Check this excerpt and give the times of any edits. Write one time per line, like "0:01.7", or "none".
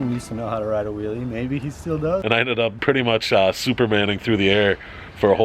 0:02.2